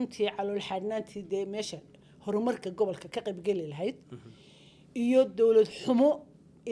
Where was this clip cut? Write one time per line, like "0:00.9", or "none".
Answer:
none